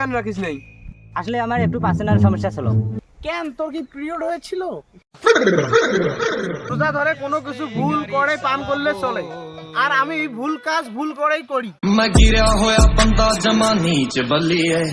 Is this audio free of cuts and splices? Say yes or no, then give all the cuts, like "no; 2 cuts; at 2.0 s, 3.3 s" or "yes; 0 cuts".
no; 2 cuts; at 6.7 s, 11.7 s